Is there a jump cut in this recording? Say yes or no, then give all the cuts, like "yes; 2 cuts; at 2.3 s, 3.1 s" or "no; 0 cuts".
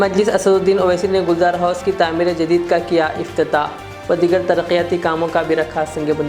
no; 0 cuts